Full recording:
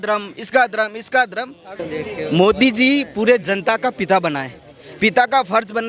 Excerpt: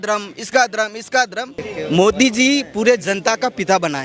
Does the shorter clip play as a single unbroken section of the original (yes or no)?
no